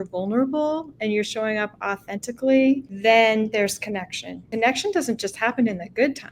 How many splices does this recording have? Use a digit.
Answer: 2